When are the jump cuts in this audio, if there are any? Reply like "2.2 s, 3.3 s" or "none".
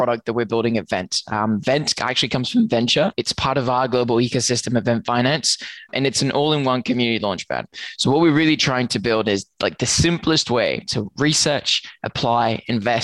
3.2 s, 5.9 s

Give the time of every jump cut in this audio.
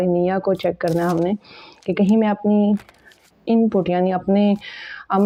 none

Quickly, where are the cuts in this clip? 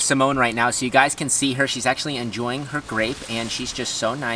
none

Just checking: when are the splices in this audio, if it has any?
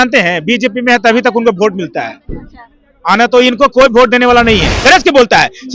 4.7 s

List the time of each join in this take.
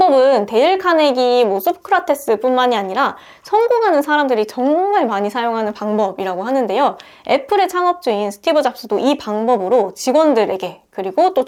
none

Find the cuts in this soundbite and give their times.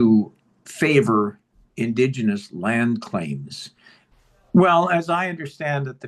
3.8 s

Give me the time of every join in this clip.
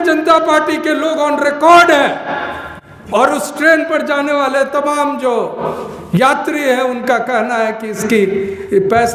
none

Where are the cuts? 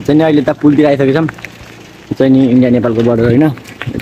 none

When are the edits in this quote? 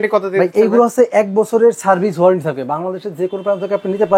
none

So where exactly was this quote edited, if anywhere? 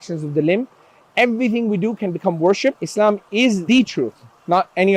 2.8 s

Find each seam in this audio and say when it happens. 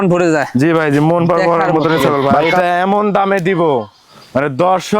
2.4 s

